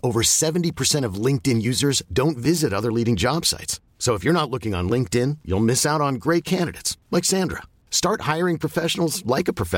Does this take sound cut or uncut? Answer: uncut